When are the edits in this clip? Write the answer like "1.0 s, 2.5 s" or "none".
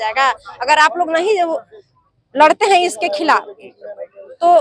none